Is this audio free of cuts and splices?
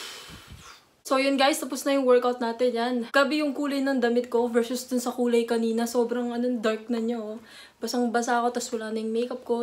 yes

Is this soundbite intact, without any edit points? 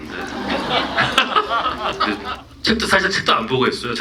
no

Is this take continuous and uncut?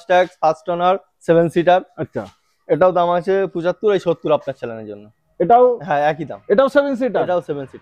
yes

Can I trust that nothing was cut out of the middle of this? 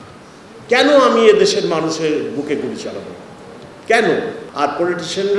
no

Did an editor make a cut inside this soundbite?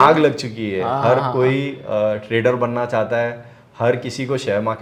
no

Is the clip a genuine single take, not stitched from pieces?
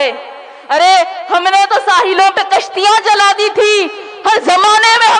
yes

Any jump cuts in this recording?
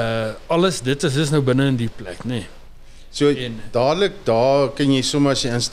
no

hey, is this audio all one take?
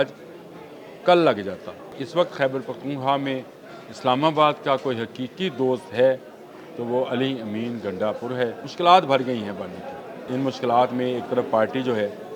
no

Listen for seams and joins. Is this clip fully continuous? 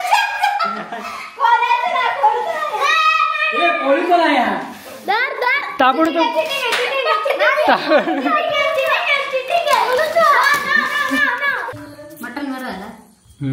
no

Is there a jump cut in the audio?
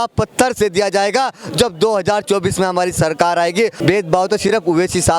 yes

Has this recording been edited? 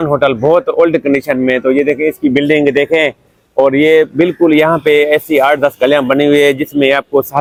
no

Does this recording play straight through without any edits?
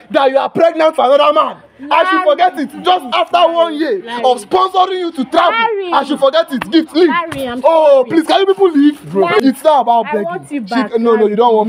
no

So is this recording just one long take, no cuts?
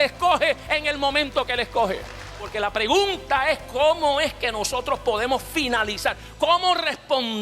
no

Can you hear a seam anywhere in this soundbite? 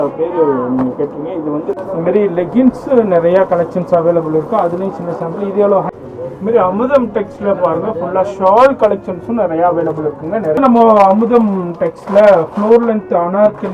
yes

